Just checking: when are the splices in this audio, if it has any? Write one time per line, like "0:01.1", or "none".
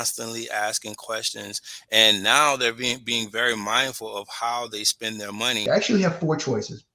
0:05.6